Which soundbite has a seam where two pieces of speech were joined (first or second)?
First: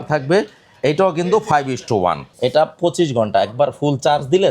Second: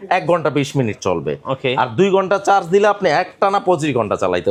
first